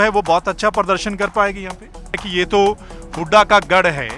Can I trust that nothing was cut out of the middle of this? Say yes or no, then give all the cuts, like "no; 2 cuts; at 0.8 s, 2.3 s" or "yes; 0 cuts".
no; 1 cut; at 2.2 s